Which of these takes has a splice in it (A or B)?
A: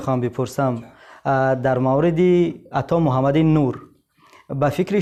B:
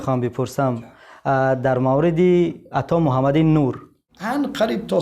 B